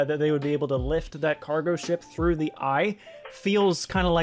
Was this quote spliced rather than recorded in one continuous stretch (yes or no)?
no